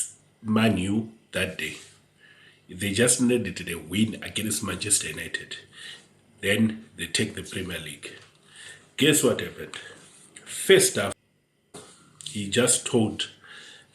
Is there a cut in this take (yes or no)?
yes